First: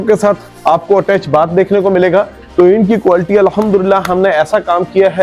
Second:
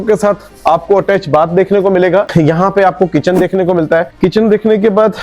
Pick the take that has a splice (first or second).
first